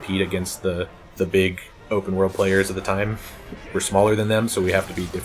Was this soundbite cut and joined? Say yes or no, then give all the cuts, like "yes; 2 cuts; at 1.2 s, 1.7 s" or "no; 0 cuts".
yes; 2 cuts; at 1.0 s, 3.6 s